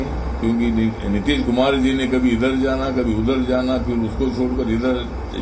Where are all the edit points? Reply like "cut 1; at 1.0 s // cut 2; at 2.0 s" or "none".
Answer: none